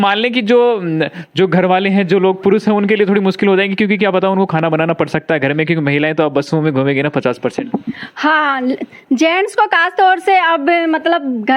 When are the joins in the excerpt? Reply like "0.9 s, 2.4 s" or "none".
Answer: none